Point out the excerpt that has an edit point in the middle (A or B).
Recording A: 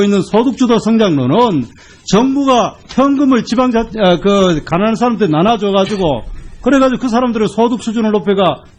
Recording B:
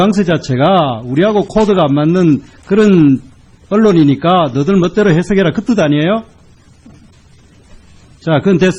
A